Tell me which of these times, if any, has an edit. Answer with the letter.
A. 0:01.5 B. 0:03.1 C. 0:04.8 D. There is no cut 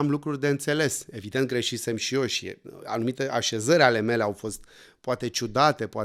D